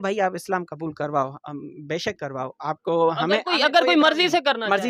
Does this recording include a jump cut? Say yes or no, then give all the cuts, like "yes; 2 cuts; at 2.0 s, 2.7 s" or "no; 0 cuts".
no; 0 cuts